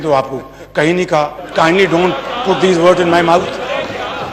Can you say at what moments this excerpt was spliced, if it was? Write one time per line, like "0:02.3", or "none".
0:01.4